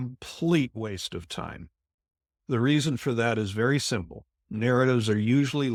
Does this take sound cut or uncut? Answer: uncut